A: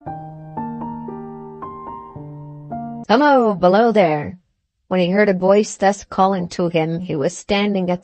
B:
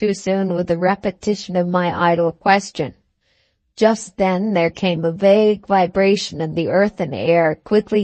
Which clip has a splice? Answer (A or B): A